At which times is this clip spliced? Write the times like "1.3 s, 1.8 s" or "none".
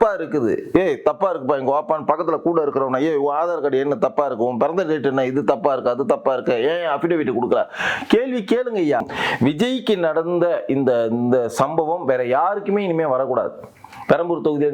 9.1 s

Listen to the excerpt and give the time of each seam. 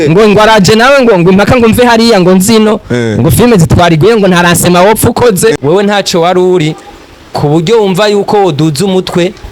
5.6 s

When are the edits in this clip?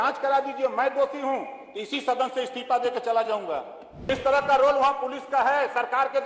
4.1 s

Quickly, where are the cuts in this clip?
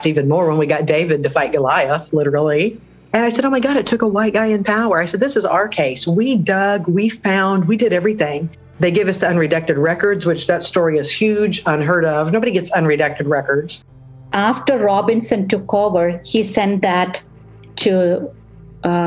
14.2 s

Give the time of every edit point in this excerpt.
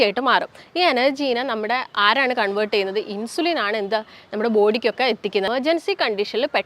5.5 s

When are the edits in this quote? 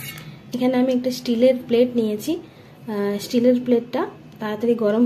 none

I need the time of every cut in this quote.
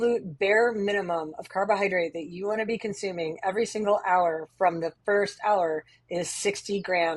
none

